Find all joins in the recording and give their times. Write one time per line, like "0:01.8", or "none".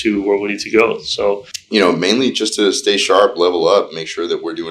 0:01.5